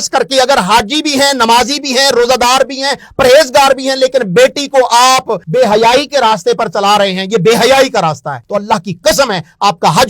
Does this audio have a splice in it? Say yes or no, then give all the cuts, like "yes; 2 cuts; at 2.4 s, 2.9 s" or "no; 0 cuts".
yes; 2 cuts; at 5.4 s, 8.3 s